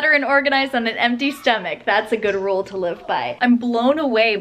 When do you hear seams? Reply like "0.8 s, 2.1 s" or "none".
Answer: 3.3 s